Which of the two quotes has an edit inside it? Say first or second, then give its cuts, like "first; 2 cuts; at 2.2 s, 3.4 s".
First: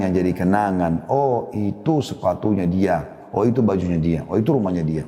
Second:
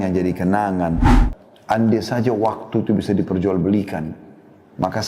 second; 1 cut; at 1.0 s